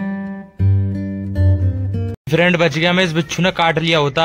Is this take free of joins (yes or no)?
no